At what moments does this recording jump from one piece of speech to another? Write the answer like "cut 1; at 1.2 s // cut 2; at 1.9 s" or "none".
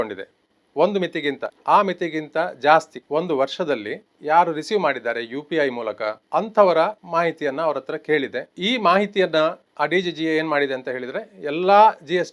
cut 1; at 1.5 s // cut 2; at 3.0 s // cut 3; at 6.2 s // cut 4; at 7.0 s // cut 5; at 8.5 s // cut 6; at 9.6 s